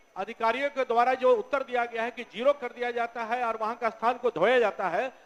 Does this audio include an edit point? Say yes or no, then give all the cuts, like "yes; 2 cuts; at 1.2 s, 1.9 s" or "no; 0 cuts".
no; 0 cuts